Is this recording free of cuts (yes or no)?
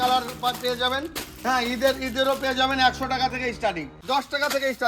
no